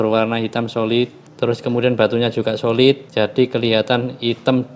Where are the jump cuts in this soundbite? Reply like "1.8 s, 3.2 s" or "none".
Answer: 1.2 s, 3.1 s